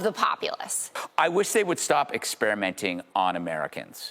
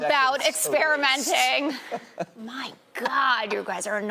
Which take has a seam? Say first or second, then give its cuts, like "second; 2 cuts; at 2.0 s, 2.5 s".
first; 1 cut; at 1.0 s